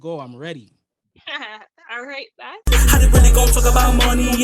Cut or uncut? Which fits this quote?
cut